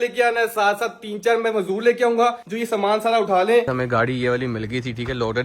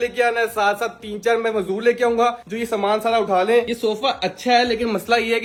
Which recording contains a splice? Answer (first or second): first